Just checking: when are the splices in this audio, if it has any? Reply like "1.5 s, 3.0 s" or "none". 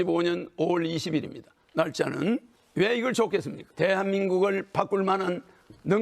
2.6 s, 3.6 s